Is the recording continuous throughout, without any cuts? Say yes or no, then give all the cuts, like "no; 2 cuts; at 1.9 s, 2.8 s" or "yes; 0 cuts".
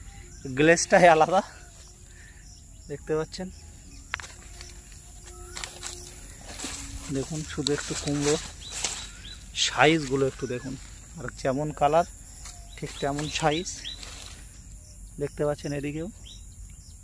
yes; 0 cuts